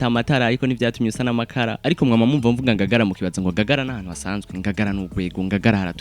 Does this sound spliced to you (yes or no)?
yes